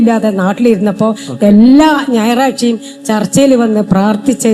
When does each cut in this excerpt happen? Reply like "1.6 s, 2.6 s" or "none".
none